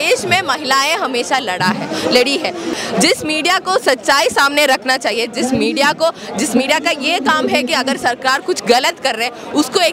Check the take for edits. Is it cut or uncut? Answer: cut